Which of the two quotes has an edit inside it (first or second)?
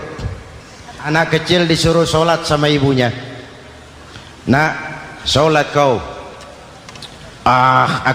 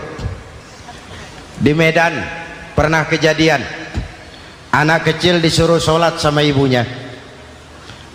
first